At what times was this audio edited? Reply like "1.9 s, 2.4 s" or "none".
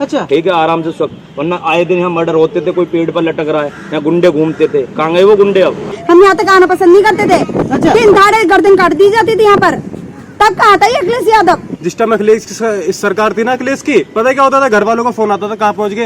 5.9 s, 11.7 s